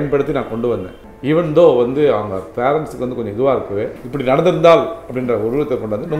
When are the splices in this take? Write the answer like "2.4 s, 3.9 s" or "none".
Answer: 4.0 s